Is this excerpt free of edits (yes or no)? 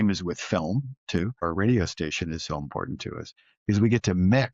no